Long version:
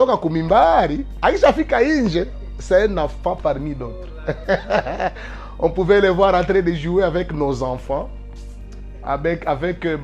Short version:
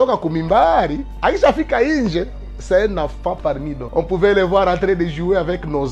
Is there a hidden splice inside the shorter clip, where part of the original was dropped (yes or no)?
yes